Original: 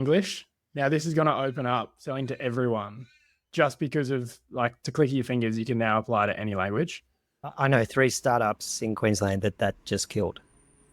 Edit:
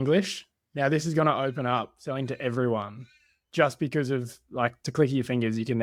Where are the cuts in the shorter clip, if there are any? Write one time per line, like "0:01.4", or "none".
none

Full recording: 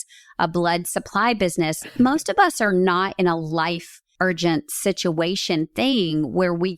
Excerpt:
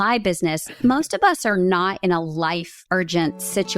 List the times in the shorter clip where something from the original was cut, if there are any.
0:02.7

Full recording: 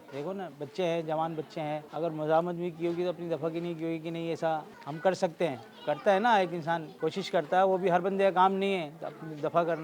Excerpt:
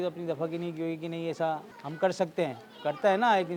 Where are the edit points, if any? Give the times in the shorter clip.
none

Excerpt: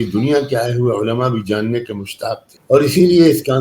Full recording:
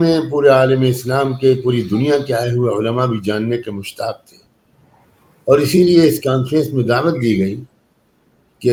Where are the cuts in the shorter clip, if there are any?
0:02.5

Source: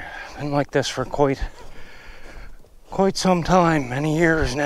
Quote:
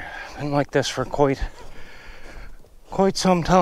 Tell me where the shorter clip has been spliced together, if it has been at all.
none

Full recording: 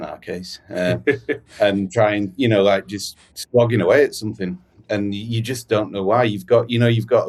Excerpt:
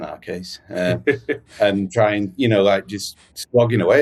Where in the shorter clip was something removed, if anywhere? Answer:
none

